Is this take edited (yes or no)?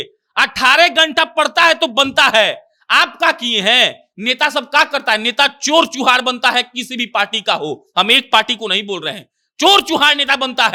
no